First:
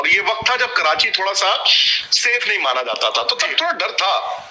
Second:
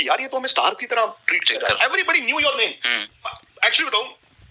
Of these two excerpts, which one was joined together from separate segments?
second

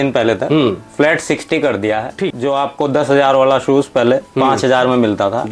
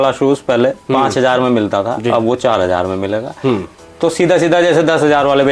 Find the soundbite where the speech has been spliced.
first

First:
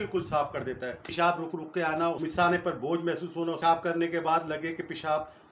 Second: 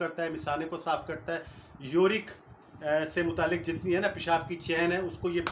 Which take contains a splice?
first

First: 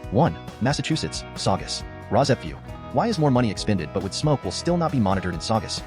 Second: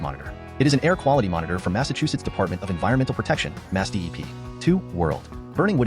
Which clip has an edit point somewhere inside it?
second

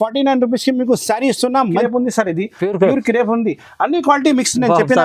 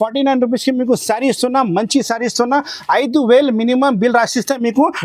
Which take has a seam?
first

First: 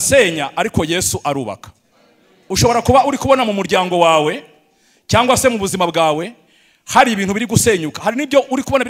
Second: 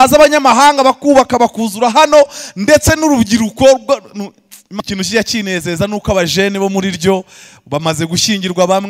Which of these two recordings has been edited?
second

